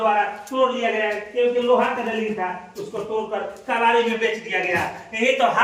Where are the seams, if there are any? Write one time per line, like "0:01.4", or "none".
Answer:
none